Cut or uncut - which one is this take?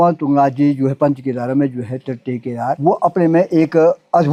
uncut